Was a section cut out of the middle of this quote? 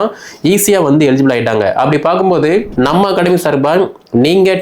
yes; 1 cut; at 2.7 s

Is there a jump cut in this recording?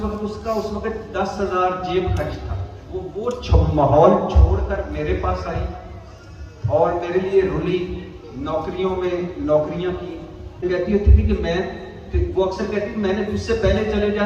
yes; 1 cut; at 10.6 s

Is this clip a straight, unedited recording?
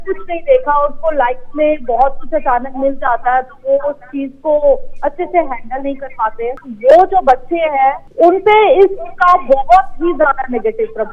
no; 2 cuts; at 6.6 s, 8.0 s

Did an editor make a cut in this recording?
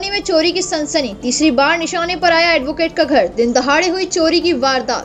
no; 0 cuts

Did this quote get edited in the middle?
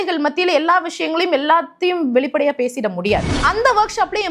yes; 1 cut; at 3.3 s

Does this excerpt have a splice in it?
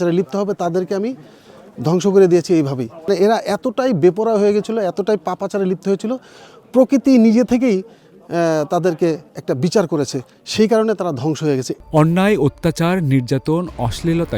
yes; 2 cuts; at 3.1 s, 11.7 s

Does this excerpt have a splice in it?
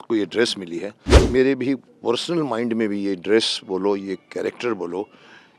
yes; 1 cut; at 1.3 s

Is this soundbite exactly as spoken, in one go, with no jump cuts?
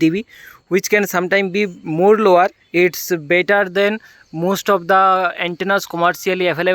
no; 1 cut; at 2.6 s

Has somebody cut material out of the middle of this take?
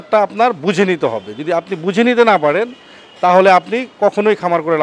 no; 0 cuts

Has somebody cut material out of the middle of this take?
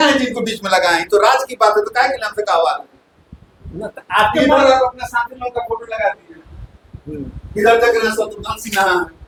no; 0 cuts

